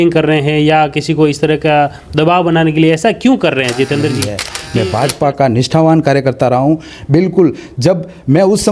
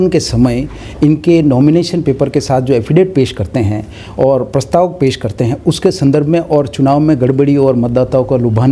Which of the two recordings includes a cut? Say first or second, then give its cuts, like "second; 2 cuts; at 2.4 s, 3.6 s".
first; 1 cut; at 4.4 s